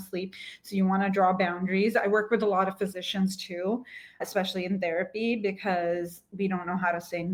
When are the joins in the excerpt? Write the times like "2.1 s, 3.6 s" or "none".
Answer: none